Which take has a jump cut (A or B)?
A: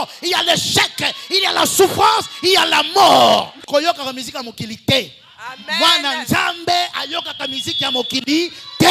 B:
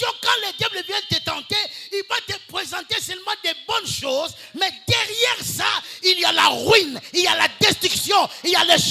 A